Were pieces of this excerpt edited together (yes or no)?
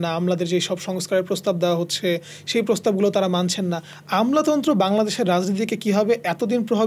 no